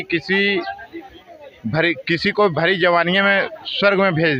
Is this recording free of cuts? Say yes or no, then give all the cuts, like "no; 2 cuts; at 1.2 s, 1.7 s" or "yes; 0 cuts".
yes; 0 cuts